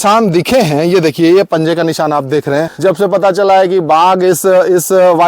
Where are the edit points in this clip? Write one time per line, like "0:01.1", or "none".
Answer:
0:02.7

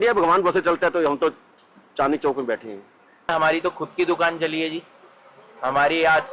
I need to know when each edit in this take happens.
0:03.3

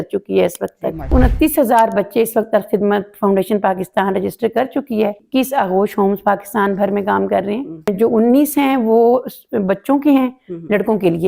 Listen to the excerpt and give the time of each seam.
0:01.1
0:05.2
0:07.9

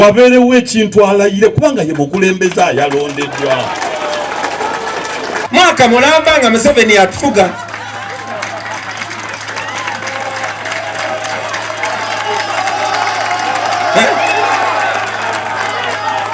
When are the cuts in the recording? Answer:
0:05.4

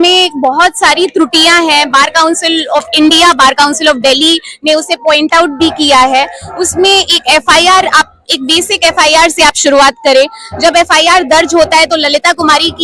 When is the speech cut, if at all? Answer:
none

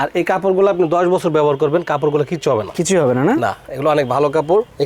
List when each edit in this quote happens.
none

